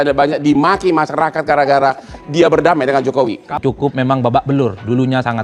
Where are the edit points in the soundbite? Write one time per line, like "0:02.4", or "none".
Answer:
0:03.6